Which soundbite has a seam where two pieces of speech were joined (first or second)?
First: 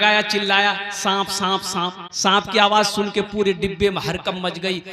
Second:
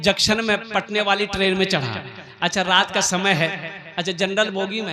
first